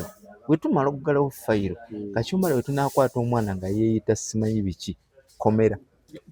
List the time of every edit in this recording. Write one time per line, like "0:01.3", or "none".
none